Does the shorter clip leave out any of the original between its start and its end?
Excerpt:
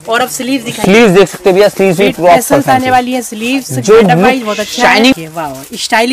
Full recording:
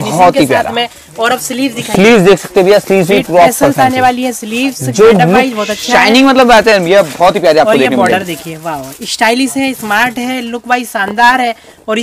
yes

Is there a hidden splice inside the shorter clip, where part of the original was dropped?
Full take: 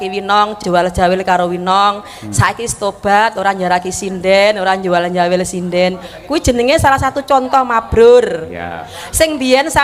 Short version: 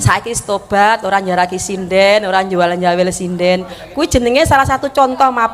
no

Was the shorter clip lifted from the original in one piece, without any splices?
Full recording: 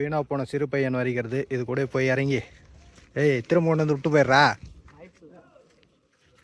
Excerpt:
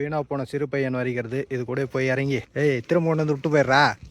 no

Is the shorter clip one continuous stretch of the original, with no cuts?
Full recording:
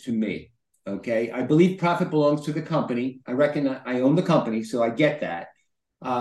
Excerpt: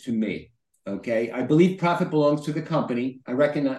yes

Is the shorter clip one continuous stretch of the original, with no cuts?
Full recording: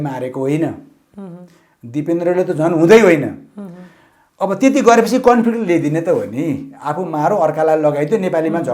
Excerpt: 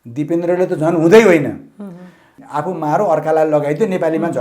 no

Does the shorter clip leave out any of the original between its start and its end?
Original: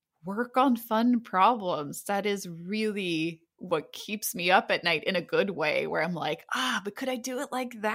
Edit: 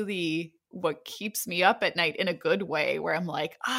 no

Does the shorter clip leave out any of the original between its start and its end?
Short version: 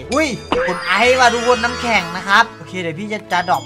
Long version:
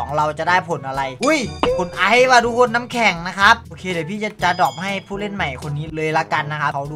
no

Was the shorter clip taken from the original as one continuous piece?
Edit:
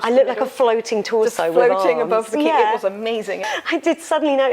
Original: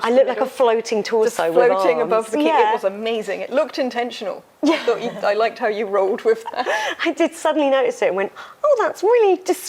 no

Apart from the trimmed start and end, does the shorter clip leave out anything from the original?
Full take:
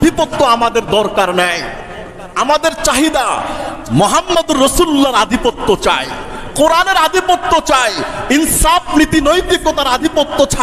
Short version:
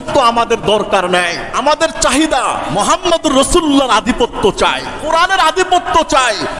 yes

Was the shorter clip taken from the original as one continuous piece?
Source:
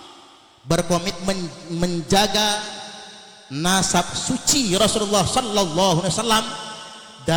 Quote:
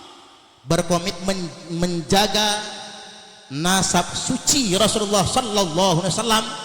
yes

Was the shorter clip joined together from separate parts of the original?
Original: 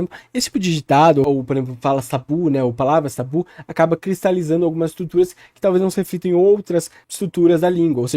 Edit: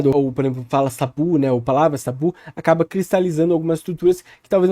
no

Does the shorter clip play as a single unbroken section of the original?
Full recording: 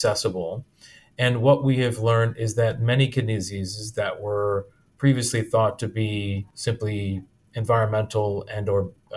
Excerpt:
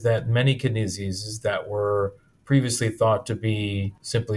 yes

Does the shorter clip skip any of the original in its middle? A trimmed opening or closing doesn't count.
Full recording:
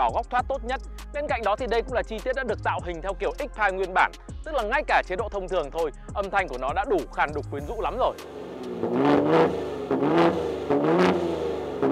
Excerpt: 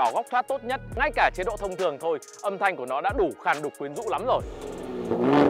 yes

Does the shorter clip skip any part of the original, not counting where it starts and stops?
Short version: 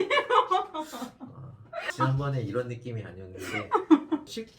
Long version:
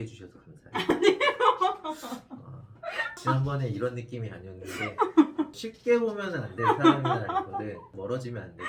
yes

